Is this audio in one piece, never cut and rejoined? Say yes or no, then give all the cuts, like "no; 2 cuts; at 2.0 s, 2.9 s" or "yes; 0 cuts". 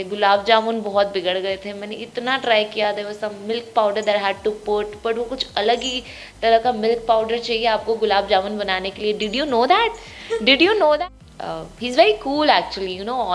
no; 1 cut; at 11.0 s